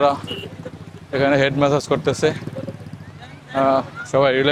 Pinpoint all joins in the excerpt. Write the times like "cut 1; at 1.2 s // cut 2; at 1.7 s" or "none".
none